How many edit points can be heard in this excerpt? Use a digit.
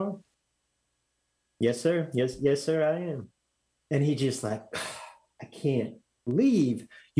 1